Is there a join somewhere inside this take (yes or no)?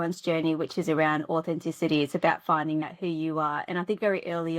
yes